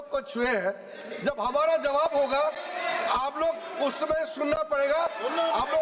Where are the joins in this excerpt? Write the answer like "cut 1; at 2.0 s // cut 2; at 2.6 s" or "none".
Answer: none